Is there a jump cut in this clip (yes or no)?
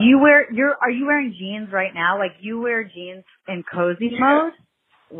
no